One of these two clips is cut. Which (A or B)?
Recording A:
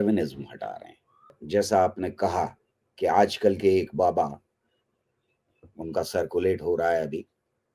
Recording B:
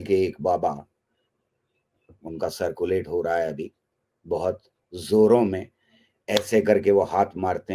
A